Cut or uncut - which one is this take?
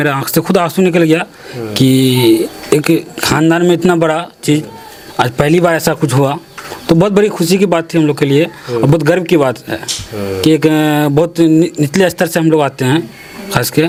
uncut